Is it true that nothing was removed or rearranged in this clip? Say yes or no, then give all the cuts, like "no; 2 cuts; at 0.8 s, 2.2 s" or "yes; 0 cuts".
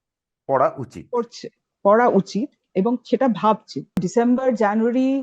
no; 1 cut; at 4.0 s